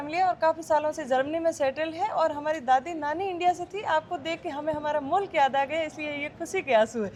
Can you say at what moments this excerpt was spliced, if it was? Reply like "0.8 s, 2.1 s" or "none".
none